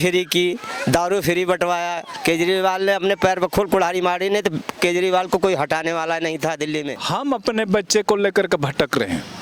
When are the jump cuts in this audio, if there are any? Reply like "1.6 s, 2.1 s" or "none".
7.0 s